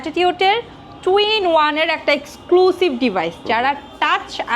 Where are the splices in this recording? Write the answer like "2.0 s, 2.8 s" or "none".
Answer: none